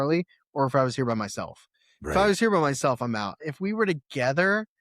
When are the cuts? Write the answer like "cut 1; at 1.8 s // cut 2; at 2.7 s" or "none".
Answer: cut 1; at 3.4 s